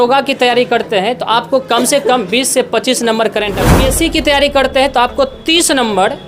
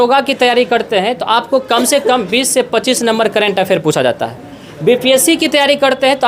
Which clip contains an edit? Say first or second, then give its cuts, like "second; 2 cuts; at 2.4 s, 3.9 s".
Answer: first; 1 cut; at 3.8 s